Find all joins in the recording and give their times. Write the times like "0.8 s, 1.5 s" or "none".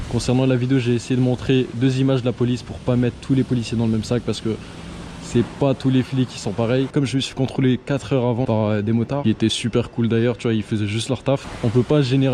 none